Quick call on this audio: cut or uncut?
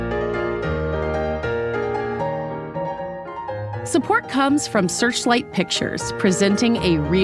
uncut